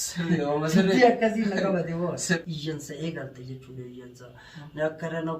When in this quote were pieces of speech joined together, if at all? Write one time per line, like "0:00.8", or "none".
0:02.4